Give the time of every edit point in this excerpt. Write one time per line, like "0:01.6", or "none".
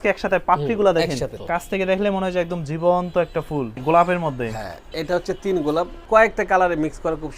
0:01.4
0:03.8
0:06.0